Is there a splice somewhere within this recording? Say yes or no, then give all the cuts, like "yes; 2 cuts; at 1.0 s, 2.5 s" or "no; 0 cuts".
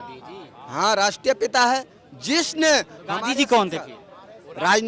no; 0 cuts